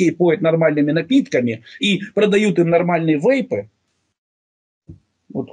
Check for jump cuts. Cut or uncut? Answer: uncut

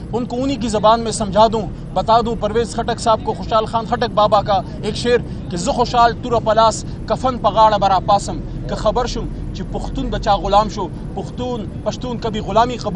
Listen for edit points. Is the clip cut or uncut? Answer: uncut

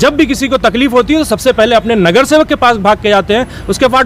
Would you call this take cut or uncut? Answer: uncut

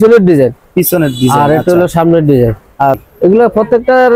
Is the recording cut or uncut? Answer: cut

